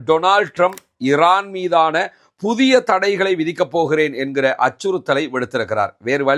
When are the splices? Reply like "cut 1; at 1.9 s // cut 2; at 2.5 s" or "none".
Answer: none